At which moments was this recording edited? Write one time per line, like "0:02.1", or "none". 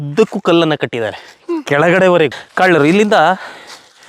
0:02.4